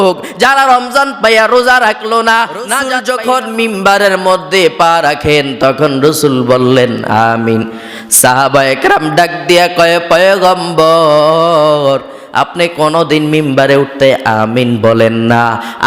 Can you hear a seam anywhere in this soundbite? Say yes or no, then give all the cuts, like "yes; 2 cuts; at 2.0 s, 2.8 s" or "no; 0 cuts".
yes; 1 cut; at 3.0 s